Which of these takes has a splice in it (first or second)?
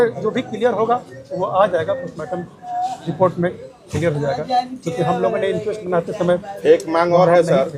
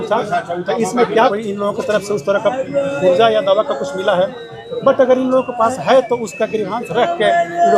second